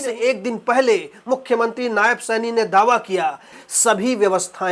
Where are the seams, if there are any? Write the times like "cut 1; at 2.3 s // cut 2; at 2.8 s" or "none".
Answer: cut 1; at 3.6 s